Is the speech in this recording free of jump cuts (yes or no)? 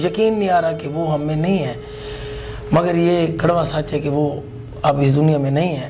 yes